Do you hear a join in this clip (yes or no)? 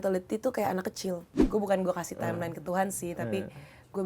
yes